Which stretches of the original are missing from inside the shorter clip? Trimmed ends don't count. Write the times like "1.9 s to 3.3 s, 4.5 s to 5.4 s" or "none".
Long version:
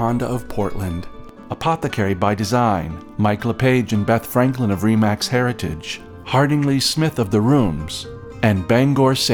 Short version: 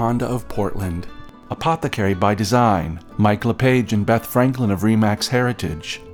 none

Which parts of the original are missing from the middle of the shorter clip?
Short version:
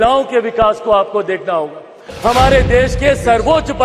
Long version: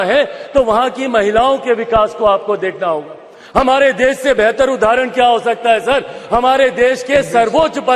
3.4 s to 6.1 s

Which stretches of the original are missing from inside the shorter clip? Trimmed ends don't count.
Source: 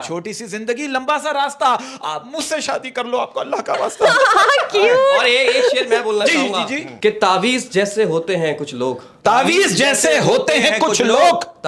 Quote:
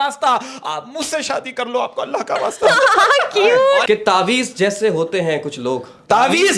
5.2 s to 7.0 s

